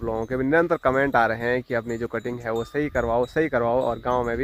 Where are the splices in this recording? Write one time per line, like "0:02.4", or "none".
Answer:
none